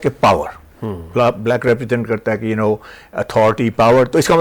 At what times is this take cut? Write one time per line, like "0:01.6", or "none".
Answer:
none